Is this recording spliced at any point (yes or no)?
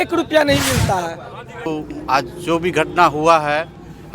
yes